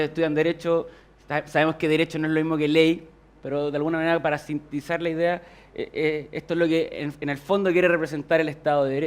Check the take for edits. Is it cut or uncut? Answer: uncut